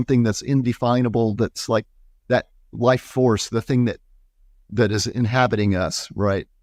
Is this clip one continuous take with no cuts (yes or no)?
yes